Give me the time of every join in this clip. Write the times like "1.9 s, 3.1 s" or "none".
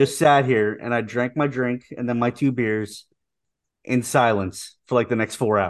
none